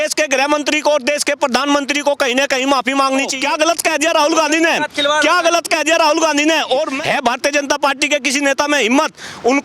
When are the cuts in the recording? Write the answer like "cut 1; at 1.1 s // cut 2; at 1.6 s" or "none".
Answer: cut 1; at 3.3 s // cut 2; at 6.9 s